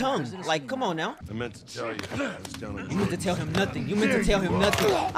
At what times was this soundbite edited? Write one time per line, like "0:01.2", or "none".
0:01.2